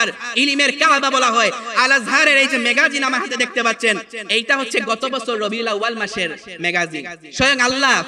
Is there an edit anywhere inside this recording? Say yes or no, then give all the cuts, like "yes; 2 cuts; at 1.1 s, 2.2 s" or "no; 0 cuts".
yes; 2 cuts; at 4.1 s, 7.2 s